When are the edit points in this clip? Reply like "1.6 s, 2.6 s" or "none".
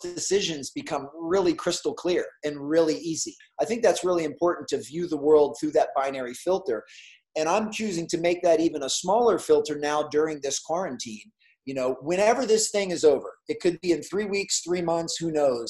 3.4 s

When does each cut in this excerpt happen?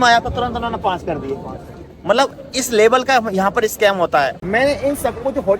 4.4 s

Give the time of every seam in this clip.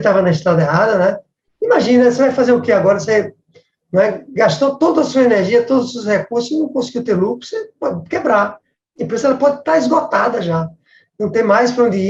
none

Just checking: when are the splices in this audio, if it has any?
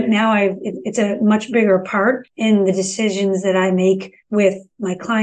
2.3 s, 4.1 s

